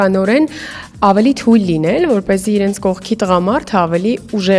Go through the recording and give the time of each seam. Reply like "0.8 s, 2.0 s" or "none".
none